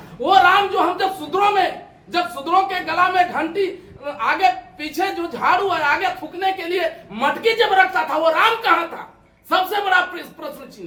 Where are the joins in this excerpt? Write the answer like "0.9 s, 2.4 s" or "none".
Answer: none